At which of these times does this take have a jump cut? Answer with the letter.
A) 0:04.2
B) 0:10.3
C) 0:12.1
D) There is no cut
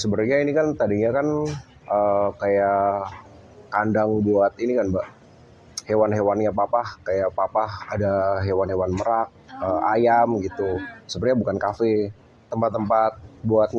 D